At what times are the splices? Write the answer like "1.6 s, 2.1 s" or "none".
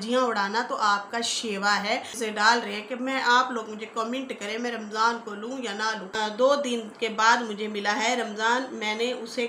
2.1 s, 6.2 s